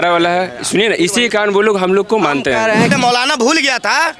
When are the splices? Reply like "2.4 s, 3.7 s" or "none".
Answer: 2.9 s